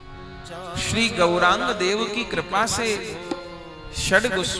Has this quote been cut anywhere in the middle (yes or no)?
no